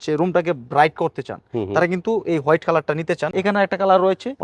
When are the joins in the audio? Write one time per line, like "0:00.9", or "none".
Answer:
0:03.2